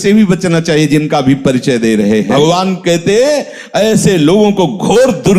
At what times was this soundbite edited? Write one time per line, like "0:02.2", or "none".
0:02.3